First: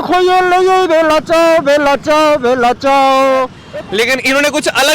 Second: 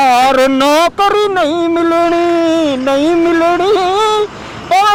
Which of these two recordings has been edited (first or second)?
first